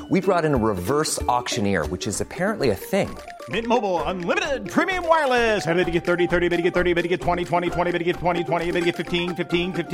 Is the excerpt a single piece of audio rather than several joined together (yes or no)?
yes